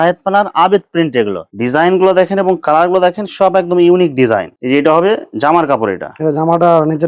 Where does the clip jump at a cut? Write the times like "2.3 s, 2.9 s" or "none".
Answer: 1.4 s, 4.5 s